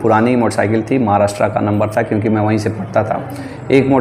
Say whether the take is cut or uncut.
uncut